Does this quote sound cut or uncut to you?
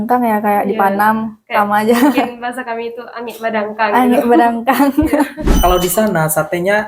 cut